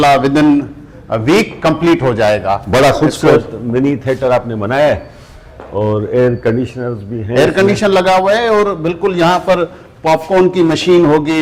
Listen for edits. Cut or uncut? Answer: uncut